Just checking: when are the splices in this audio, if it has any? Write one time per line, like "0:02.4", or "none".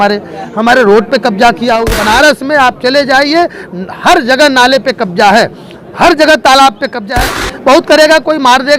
0:01.9
0:07.4

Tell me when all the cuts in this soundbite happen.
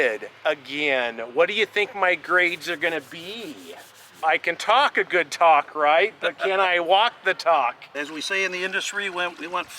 0:04.2
0:08.0

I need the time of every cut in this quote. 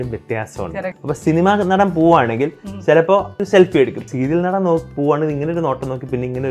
0:01.0
0:03.4

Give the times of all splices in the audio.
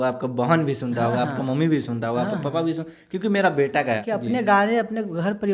0:04.0

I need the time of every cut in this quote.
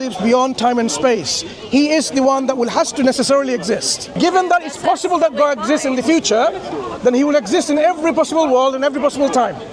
0:04.1

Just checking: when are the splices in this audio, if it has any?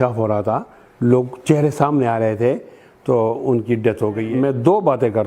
0:04.2

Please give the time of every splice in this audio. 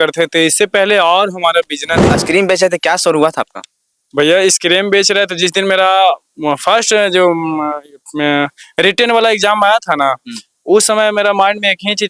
0:02.1

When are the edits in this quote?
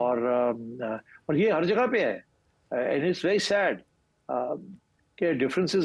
none

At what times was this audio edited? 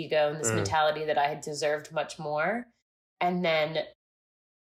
none

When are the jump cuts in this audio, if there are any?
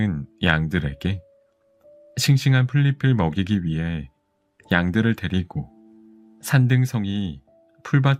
none

